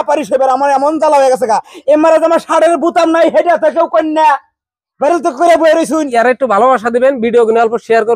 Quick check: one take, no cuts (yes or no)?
no